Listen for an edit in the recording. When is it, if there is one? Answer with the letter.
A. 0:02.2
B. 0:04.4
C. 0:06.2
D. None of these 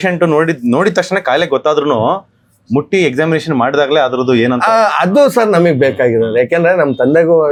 D